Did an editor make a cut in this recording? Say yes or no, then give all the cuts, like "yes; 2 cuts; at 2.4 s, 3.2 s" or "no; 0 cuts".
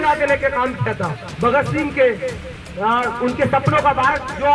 yes; 1 cut; at 1.2 s